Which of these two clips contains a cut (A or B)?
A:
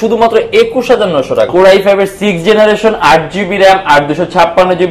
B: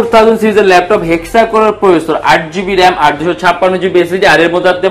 A